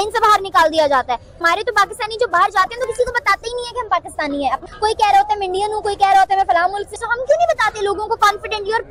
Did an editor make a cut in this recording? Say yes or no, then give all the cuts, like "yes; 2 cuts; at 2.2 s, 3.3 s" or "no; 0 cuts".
no; 0 cuts